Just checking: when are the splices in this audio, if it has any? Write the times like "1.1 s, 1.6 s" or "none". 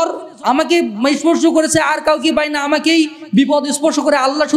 none